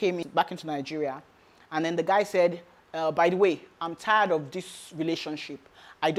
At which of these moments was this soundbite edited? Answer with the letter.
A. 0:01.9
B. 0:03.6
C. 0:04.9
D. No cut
D